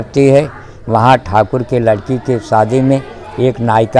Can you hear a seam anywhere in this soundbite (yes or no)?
no